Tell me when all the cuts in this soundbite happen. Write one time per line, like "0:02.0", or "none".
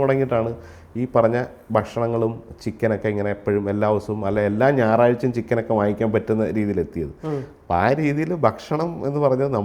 none